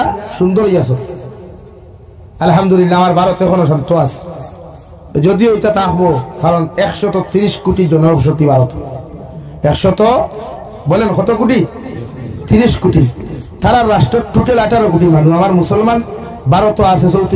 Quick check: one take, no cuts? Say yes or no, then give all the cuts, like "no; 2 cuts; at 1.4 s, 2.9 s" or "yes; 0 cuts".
yes; 0 cuts